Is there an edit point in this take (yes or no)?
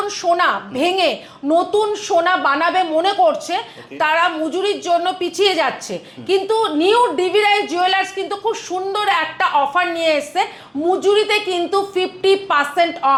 no